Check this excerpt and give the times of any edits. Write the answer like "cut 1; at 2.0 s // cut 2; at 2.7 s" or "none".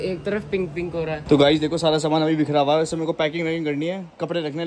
cut 1; at 1.2 s